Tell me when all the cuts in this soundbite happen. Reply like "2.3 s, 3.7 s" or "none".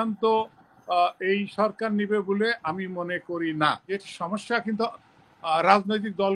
3.8 s